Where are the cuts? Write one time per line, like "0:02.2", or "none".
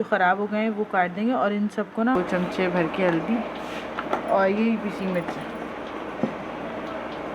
0:02.2